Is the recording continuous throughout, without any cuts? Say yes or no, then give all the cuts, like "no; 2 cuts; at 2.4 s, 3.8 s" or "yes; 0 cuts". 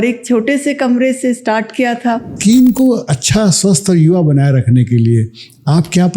no; 1 cut; at 2.3 s